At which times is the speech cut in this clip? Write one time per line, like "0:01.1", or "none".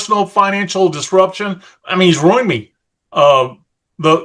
none